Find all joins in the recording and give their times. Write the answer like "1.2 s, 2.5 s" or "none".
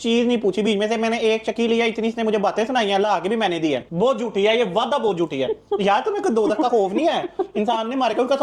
3.9 s